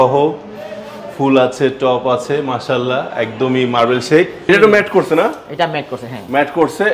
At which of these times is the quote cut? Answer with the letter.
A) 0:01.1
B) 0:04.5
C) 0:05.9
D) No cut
B